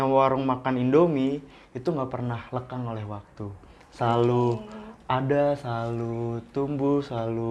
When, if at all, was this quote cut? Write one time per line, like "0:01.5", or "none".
none